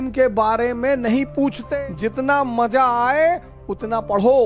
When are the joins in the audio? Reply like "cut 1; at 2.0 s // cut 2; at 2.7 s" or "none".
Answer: cut 1; at 1.6 s